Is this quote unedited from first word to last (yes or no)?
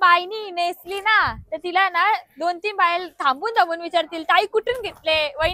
yes